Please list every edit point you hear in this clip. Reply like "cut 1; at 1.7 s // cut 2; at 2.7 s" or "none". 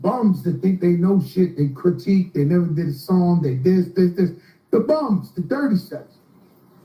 cut 1; at 1.7 s

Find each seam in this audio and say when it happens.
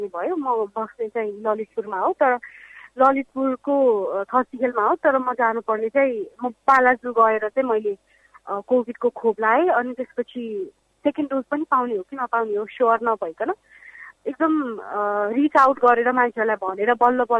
none

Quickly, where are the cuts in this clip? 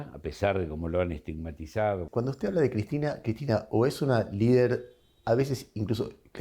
cut 1; at 2.0 s

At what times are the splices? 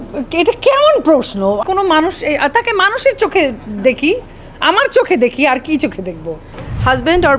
cut 1; at 1.6 s // cut 2; at 6.5 s

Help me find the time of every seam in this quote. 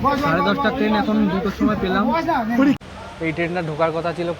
cut 1; at 2.8 s

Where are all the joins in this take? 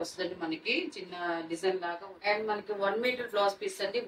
cut 1; at 2.0 s

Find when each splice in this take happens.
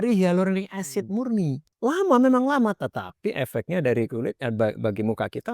cut 1; at 1.6 s

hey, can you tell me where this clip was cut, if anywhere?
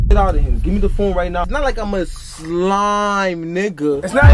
cut 1; at 1.5 s

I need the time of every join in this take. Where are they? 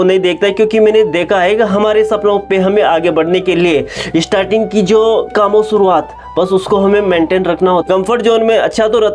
cut 1; at 5.3 s // cut 2; at 7.8 s

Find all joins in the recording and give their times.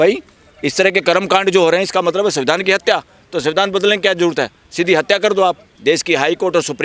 cut 1; at 5.7 s

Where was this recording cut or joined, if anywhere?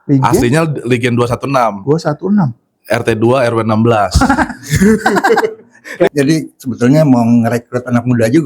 cut 1; at 6.1 s

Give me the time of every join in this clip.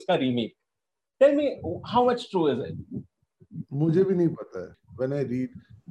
cut 1; at 4.8 s

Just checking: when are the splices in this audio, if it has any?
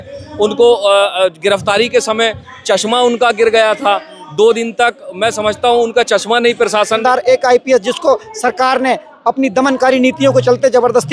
cut 1; at 7.0 s

